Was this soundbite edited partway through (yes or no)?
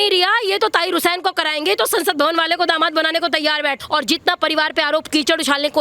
yes